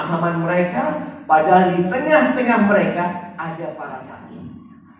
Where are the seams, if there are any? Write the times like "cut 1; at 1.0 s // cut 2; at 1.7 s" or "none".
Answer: cut 1; at 3.9 s

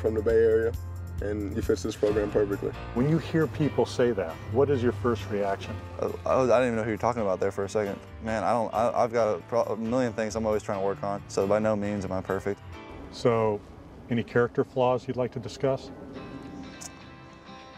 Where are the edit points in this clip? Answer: cut 1; at 1.4 s

